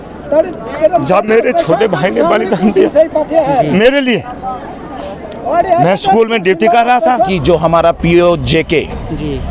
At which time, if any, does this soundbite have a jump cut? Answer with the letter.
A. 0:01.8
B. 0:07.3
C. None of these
B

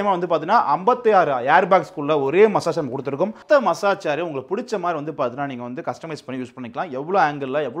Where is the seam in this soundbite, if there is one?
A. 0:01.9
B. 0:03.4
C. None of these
B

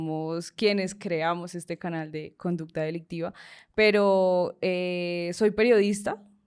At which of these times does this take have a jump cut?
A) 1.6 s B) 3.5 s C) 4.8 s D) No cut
D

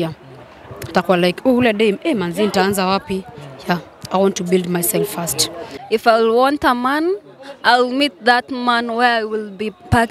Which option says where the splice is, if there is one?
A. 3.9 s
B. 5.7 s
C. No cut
B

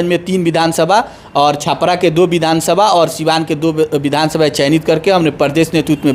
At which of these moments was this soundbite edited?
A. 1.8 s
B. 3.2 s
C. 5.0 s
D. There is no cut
D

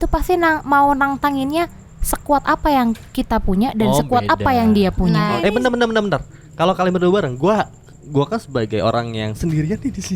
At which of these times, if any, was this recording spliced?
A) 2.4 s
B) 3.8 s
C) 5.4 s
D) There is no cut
C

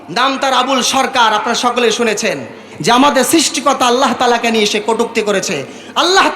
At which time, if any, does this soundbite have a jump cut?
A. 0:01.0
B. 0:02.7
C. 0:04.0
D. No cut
B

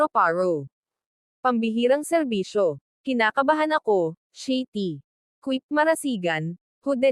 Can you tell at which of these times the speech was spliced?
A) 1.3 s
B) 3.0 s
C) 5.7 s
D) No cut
D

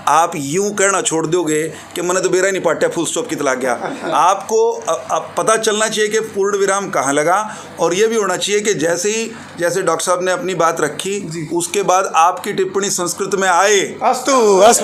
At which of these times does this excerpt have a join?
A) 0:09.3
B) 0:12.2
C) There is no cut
C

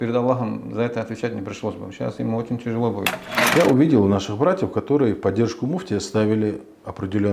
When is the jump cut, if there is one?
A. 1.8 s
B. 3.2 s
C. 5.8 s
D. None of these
B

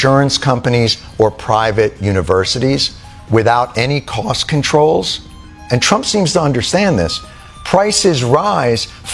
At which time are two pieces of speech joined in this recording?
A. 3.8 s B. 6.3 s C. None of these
C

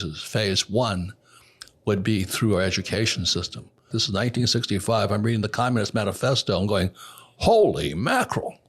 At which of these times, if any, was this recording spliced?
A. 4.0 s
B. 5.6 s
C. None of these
A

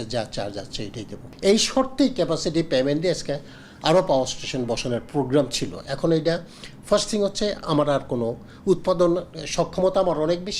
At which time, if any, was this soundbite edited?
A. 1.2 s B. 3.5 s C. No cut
A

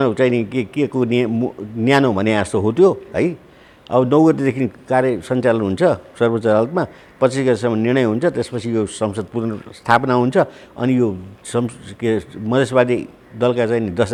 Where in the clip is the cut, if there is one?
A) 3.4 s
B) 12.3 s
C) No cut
C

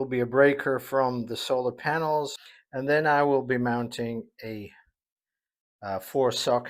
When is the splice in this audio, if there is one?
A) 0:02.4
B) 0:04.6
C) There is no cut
A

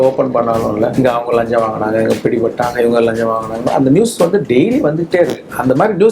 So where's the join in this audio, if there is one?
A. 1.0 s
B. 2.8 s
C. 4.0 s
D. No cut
A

